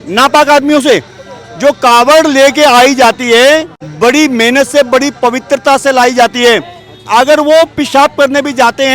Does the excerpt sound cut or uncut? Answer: cut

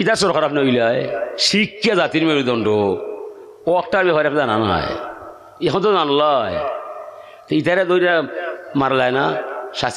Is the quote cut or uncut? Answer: uncut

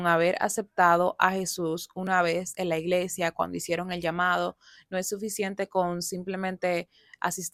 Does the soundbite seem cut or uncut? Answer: uncut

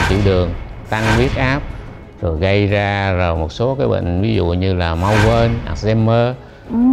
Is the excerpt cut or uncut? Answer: uncut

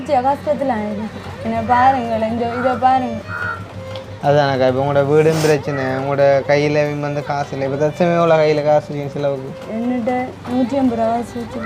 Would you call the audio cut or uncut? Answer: uncut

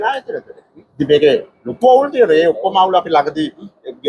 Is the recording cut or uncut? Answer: uncut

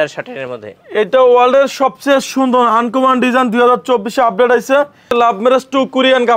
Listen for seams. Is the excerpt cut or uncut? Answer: cut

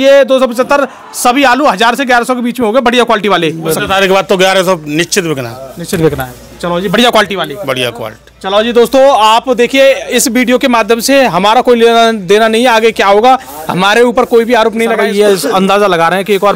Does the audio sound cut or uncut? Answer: cut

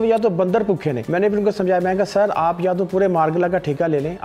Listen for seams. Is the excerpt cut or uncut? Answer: cut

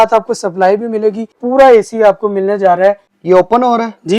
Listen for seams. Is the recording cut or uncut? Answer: cut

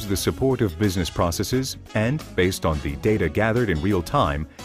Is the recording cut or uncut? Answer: uncut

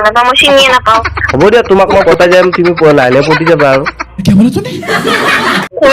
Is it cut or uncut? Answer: uncut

